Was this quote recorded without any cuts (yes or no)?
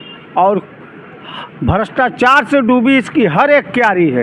yes